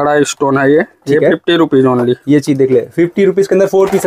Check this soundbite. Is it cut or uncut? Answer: uncut